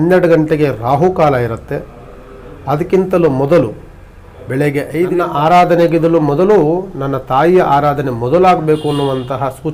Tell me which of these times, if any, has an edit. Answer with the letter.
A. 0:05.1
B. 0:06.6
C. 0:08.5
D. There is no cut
A